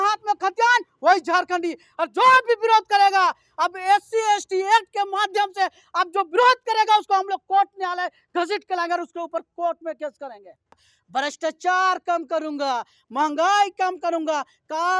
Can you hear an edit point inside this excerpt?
yes; 1 cut; at 10.8 s

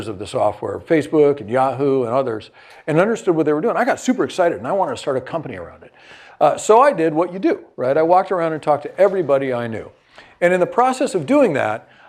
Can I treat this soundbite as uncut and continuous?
yes; 0 cuts

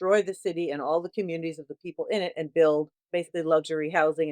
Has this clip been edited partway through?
yes; 1 cut; at 3.0 s

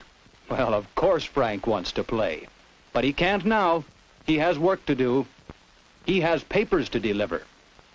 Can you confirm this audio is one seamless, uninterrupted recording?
no; 1 cut; at 6.1 s

